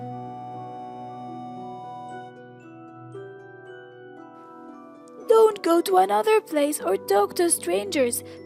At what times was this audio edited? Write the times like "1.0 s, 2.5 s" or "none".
none

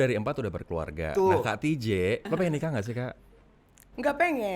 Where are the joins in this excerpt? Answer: 2.3 s

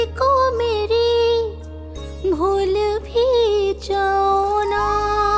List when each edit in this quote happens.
none

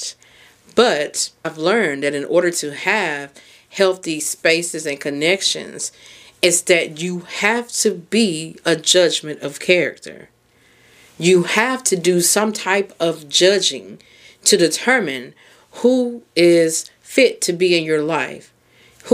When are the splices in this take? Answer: 1.5 s

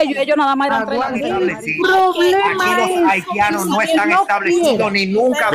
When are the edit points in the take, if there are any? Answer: 1.2 s

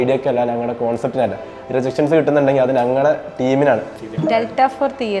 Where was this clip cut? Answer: 4.0 s

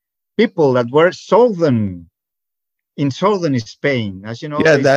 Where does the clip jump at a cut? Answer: none

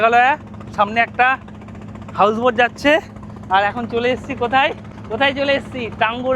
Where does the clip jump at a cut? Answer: 4.9 s

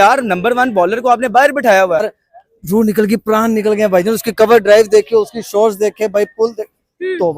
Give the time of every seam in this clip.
2.2 s

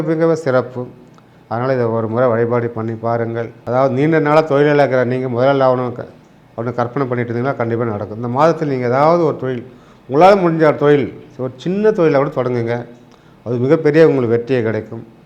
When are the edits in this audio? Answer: 3.5 s

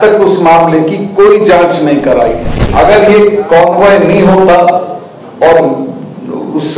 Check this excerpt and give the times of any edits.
2.5 s

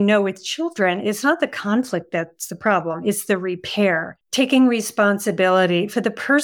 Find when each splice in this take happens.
4.2 s

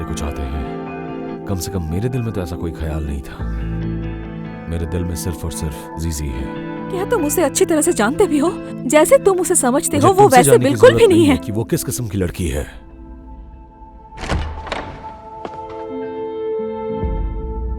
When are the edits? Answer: 7.1 s, 14.1 s, 15.7 s, 17.0 s

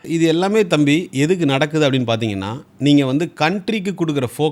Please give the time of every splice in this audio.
none

